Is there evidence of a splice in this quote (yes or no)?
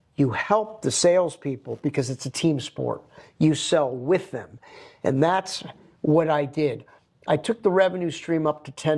no